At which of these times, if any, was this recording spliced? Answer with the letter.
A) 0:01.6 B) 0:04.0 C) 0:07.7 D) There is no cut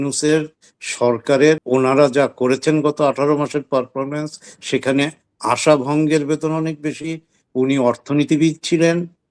A